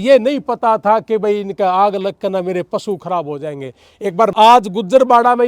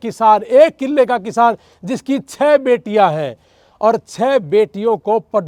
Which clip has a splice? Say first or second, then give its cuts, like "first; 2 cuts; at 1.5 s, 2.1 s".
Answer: first; 1 cut; at 4.3 s